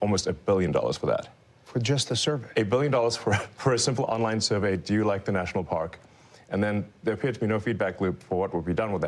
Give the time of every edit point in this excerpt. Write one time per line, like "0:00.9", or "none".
none